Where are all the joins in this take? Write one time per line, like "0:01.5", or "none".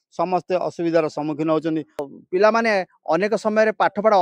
0:02.1